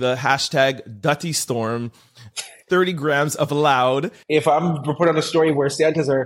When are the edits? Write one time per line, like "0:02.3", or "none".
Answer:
0:04.2